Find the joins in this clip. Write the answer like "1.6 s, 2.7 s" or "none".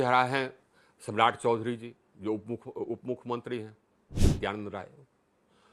4.3 s